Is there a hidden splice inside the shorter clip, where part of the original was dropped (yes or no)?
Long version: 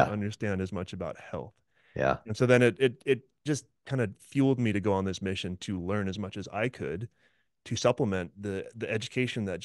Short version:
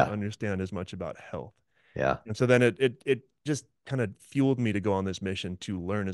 no